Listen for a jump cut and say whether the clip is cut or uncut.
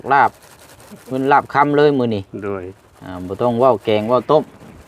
uncut